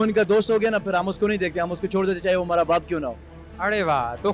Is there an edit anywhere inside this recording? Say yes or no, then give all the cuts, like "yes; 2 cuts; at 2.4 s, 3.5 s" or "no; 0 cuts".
no; 0 cuts